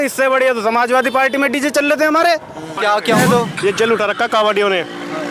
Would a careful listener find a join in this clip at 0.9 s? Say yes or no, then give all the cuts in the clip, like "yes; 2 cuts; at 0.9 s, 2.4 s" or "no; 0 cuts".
no; 1 cut; at 2.7 s